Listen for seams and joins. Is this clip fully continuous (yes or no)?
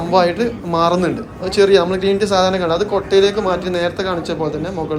yes